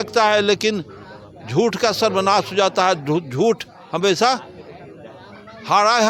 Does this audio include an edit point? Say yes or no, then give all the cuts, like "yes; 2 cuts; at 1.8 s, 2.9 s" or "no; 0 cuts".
no; 0 cuts